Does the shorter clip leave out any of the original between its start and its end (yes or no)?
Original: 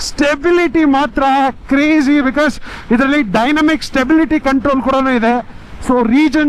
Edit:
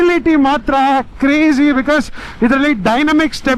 no